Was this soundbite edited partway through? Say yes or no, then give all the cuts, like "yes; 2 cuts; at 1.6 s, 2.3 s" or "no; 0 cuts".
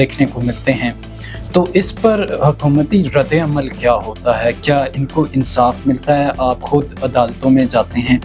no; 0 cuts